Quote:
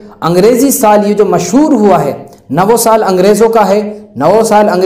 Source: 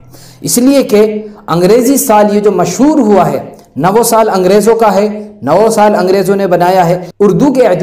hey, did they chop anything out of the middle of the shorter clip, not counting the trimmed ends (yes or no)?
no